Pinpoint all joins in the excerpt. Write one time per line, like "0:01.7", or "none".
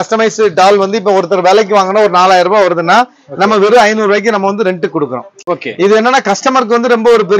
none